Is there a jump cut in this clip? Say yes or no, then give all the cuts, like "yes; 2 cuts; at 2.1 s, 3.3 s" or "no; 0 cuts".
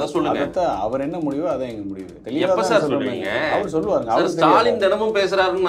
yes; 1 cut; at 2.2 s